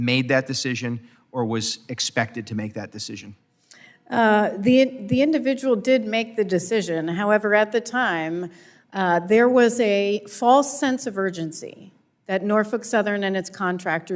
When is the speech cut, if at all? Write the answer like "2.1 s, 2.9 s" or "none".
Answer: none